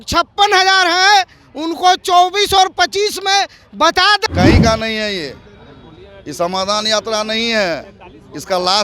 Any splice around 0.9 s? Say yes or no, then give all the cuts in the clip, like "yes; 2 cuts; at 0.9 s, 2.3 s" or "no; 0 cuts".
no; 1 cut; at 4.3 s